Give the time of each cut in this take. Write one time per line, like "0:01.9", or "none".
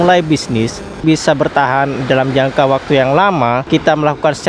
0:01.0
0:03.7